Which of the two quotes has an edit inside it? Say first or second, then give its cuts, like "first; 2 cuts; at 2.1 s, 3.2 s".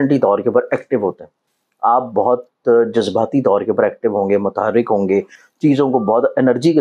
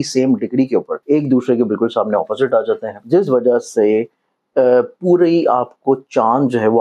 second; 2 cuts; at 0.9 s, 2.9 s